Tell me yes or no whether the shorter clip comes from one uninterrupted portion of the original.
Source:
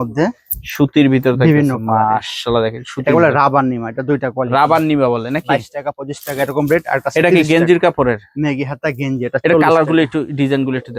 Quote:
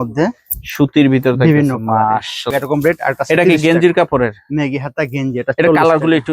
no